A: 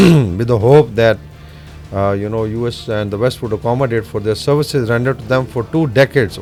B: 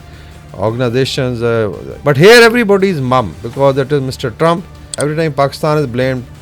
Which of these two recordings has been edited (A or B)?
B